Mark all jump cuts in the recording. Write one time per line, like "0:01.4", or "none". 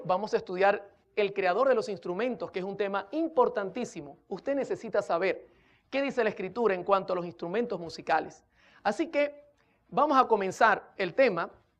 0:07.0